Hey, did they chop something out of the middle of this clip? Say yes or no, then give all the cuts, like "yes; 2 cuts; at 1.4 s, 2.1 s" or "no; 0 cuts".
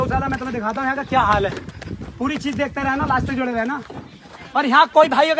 no; 0 cuts